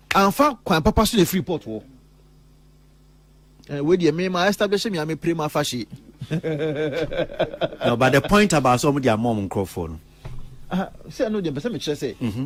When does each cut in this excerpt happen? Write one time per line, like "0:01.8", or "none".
none